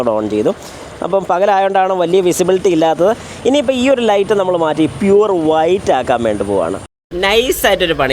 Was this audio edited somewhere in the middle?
yes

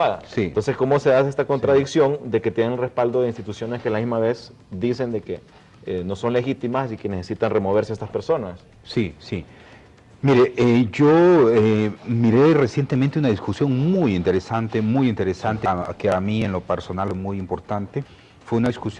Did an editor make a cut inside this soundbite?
no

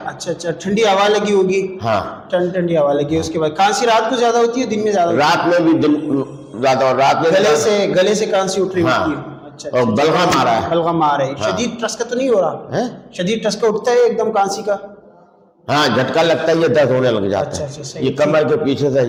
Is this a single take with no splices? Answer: yes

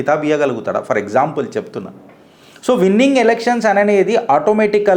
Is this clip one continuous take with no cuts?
yes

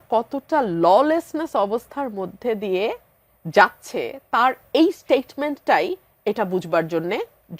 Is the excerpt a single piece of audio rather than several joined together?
yes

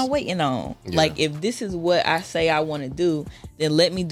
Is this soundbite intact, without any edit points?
yes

